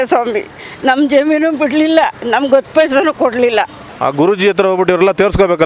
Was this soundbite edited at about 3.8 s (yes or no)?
yes